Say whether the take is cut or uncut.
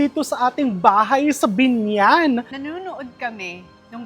cut